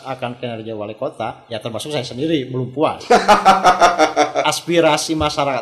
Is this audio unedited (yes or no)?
no